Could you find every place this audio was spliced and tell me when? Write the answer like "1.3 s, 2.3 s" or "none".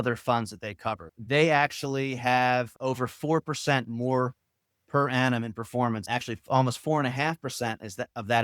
1.1 s, 2.7 s, 6.0 s